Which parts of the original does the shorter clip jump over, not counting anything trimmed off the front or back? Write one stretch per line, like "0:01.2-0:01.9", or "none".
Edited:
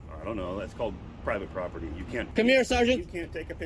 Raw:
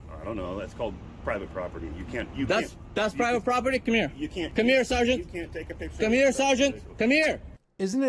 0:02.3-0:04.5

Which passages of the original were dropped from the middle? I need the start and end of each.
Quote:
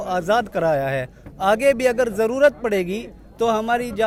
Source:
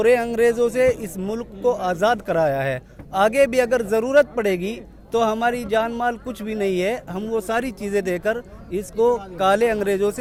none

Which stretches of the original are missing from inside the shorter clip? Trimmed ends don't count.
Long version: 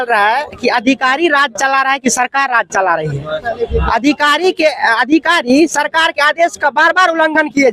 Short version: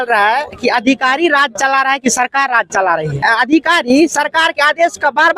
0:03.2-0:04.8

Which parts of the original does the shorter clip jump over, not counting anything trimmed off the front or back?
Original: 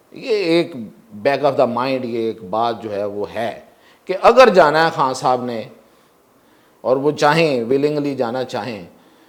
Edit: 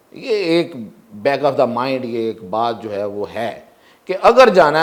none

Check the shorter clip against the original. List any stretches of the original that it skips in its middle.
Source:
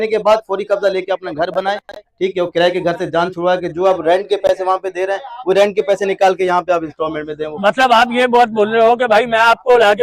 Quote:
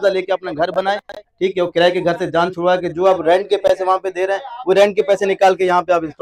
none

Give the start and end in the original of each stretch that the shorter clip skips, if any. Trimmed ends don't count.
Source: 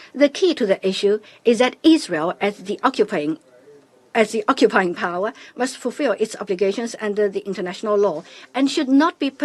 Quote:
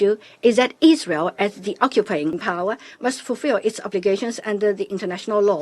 0:03.5-0:05.0

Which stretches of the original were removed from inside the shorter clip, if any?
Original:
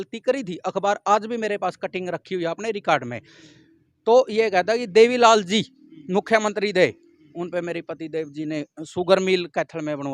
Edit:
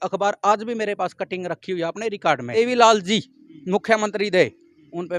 0:03.2-0:05.0

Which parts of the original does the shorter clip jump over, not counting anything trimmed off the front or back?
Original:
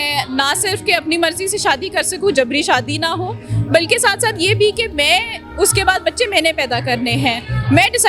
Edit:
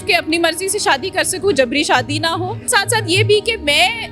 0:03.5-0:04.0

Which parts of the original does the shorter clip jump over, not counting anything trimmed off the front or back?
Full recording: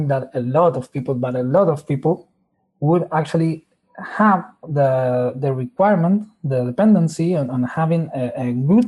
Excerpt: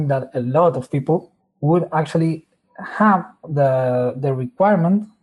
0:01.0-0:02.2

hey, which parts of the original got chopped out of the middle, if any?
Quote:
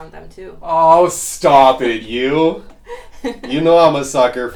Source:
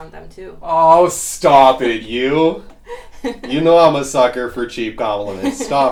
none

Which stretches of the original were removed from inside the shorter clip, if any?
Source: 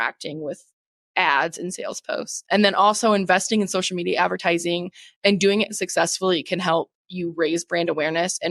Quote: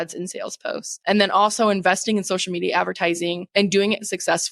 0:04.9-0:05.1

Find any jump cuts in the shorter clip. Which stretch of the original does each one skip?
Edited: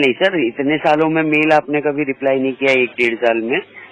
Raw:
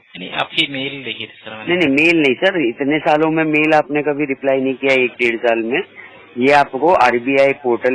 none

